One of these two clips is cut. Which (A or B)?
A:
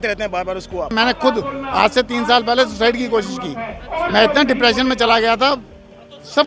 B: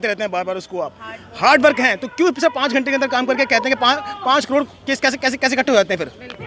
A